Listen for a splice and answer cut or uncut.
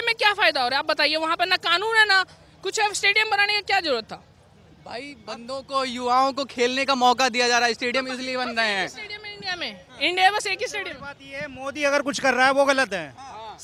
uncut